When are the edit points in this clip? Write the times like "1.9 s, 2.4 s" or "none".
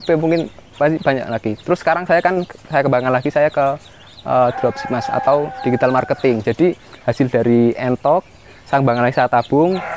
none